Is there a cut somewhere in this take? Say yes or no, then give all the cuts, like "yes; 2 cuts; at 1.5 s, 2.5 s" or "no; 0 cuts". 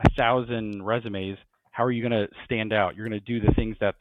no; 0 cuts